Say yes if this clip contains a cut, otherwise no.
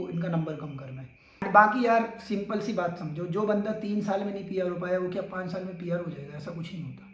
yes